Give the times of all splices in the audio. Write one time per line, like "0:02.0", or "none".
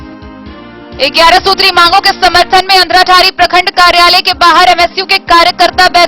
0:01.0